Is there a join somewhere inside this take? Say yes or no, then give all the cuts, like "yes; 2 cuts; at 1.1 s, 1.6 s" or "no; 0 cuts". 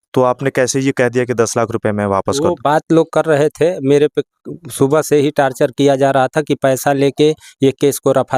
no; 0 cuts